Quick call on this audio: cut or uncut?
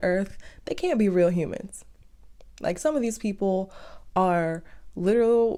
uncut